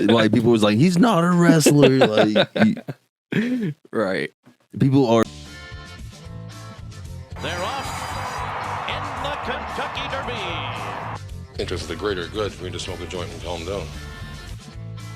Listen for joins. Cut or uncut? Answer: cut